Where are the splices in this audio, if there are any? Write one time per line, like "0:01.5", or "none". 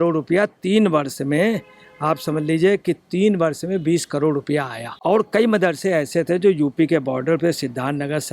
0:04.9